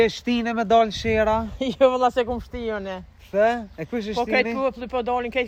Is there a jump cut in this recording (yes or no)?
no